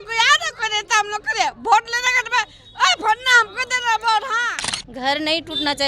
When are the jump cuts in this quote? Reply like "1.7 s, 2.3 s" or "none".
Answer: 4.7 s